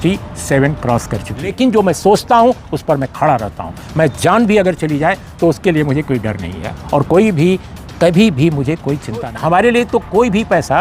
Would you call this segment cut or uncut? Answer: cut